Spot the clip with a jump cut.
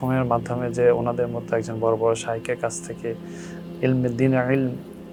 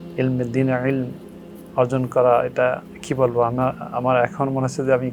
second; 1 cut; at 2.9 s

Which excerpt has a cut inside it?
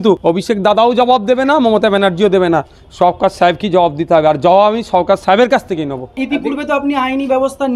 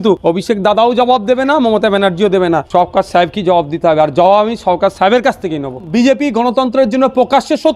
second; 2 cuts; at 2.7 s, 5.8 s

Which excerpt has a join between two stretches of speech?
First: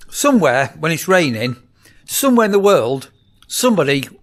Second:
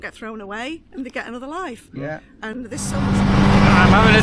second; 1 cut; at 3.1 s

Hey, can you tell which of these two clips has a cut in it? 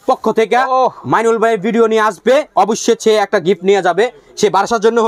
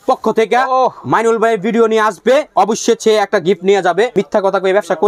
second; 1 cut; at 4.1 s

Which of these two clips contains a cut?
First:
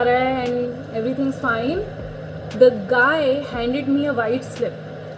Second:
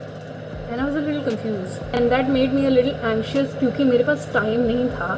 second; 1 cut; at 2.0 s

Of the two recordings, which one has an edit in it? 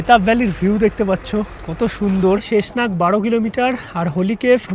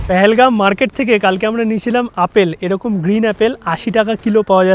first; 1 cut; at 2.5 s

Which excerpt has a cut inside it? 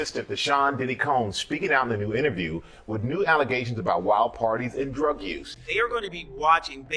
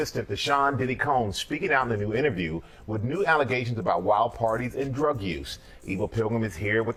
first; 1 cut; at 5.6 s

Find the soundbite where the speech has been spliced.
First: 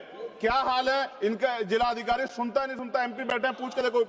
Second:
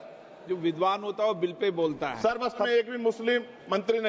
second; 1 cut; at 2.7 s

